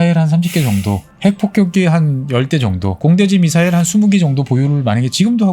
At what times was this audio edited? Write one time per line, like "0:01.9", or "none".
0:01.1
0:03.0